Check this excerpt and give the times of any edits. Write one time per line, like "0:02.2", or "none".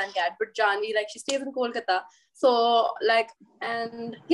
0:03.4